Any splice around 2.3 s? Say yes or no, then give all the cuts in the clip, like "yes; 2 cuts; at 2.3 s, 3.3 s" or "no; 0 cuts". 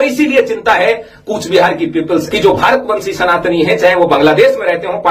yes; 1 cut; at 2.3 s